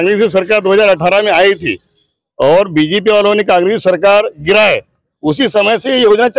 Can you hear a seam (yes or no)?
no